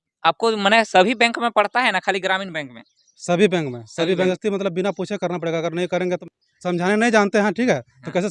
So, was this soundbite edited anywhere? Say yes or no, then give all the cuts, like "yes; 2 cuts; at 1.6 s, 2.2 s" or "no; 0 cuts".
yes; 2 cuts; at 4.3 s, 6.2 s